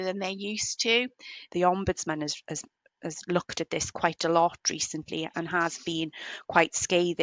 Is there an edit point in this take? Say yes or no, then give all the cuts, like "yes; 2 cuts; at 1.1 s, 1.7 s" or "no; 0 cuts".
yes; 1 cut; at 1.4 s